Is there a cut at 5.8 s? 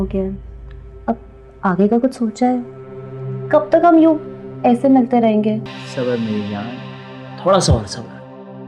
yes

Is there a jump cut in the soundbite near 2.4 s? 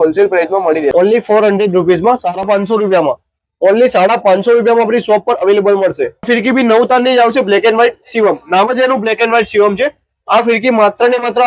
yes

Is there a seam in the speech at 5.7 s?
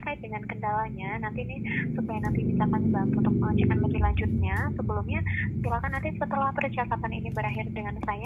no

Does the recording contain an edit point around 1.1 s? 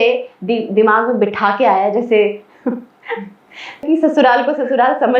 no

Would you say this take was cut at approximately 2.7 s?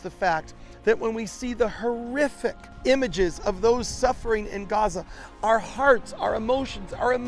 yes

